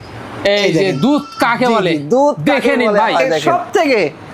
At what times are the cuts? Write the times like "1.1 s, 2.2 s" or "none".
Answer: 3.4 s